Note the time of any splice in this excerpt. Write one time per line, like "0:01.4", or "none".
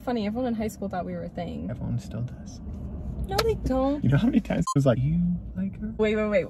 none